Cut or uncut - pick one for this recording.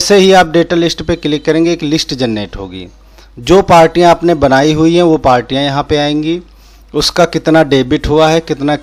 uncut